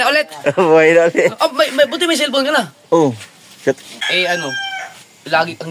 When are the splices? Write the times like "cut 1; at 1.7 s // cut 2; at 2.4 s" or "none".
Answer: cut 1; at 4.0 s